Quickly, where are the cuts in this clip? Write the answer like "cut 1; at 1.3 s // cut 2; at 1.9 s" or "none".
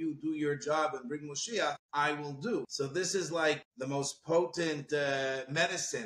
cut 1; at 1.8 s // cut 2; at 2.7 s // cut 3; at 3.7 s